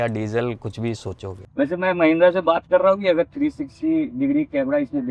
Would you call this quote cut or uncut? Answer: cut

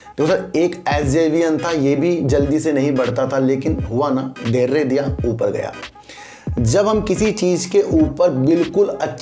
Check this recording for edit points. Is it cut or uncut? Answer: uncut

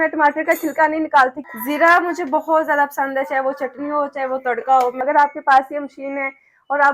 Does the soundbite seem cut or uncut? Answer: cut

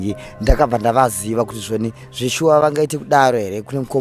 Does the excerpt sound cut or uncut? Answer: uncut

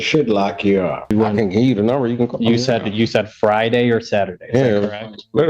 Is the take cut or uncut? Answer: cut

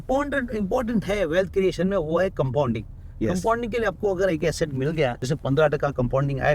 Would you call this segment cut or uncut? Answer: cut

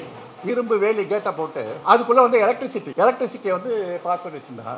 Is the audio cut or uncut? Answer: cut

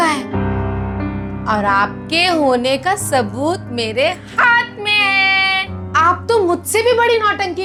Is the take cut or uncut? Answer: uncut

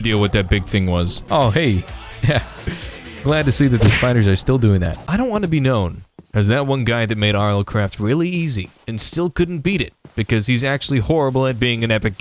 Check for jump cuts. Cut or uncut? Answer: cut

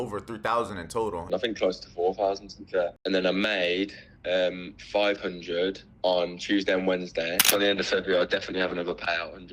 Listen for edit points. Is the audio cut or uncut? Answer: cut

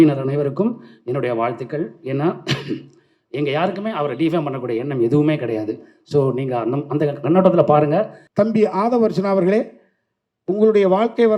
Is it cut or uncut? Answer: cut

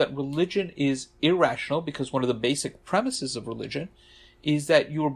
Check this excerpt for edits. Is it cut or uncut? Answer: uncut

